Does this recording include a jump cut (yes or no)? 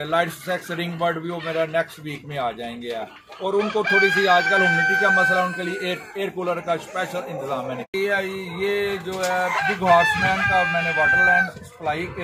yes